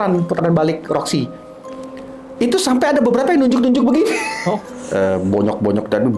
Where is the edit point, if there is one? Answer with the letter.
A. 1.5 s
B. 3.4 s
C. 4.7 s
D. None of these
C